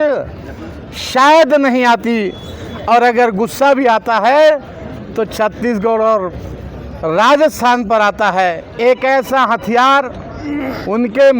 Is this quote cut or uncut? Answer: cut